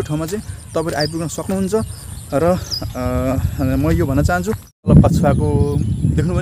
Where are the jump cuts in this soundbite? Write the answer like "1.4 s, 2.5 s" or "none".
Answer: 4.9 s